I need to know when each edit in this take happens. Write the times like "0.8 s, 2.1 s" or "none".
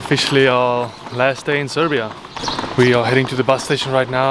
2.3 s